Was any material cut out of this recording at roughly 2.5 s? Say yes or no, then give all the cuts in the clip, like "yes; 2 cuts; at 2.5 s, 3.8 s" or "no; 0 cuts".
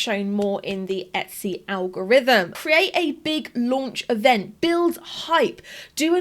yes; 1 cut; at 2.5 s